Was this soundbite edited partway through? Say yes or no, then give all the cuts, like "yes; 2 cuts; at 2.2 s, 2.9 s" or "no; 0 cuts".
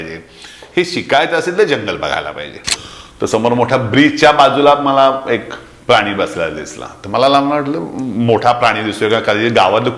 yes; 1 cut; at 2.7 s